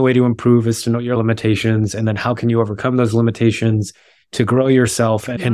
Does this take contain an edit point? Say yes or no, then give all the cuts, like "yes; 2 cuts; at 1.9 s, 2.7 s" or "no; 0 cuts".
yes; 1 cut; at 1.2 s